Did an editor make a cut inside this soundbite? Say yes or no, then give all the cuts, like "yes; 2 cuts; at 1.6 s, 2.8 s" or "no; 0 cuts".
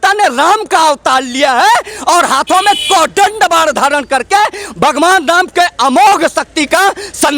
no; 0 cuts